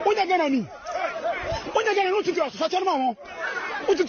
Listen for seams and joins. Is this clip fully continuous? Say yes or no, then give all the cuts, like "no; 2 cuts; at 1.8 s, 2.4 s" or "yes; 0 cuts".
yes; 0 cuts